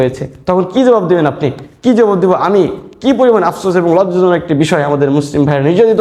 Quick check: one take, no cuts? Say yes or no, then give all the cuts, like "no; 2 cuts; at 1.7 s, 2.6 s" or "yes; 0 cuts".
yes; 0 cuts